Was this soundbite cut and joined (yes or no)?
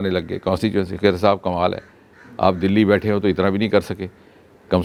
no